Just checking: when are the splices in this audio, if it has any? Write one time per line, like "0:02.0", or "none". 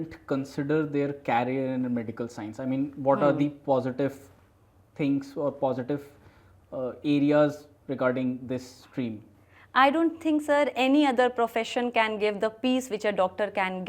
none